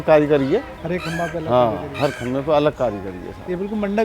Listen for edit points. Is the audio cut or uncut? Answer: uncut